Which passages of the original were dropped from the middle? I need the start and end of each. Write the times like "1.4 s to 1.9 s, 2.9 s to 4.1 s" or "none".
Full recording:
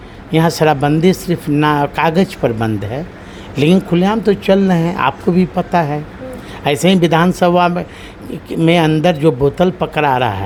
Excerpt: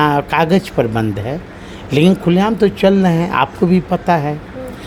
none